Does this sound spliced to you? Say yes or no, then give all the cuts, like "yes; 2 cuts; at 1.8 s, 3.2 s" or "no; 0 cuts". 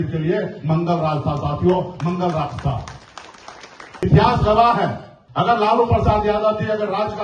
yes; 1 cut; at 4.0 s